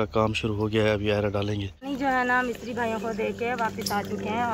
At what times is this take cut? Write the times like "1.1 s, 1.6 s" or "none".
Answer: 1.8 s